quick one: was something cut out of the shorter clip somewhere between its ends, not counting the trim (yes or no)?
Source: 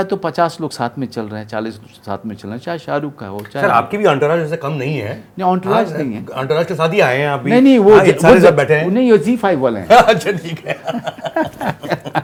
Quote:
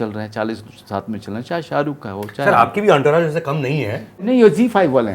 yes